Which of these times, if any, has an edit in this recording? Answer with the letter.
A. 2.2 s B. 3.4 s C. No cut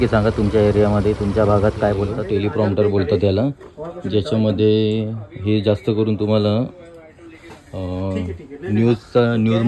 A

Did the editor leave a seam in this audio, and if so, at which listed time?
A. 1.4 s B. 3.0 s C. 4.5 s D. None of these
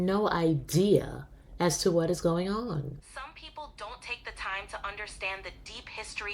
B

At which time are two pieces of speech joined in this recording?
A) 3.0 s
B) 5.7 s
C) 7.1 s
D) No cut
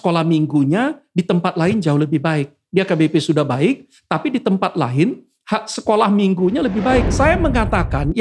C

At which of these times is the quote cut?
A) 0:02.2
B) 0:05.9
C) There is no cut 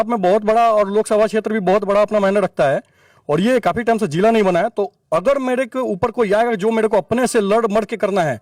C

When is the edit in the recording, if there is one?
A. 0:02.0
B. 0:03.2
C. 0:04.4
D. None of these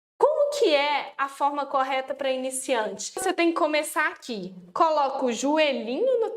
B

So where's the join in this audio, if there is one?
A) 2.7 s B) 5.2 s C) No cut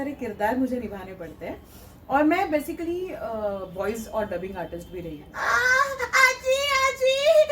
B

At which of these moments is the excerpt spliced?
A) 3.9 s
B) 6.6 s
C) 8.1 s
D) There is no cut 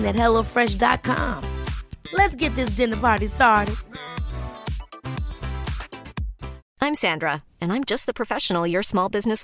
B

